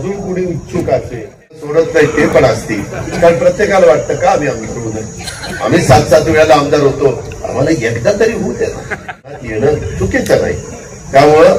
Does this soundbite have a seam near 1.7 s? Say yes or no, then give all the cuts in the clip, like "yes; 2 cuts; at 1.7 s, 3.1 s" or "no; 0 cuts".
yes; 2 cuts; at 1.7 s, 9.3 s